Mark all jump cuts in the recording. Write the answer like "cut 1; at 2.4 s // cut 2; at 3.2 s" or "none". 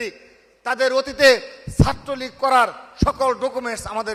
none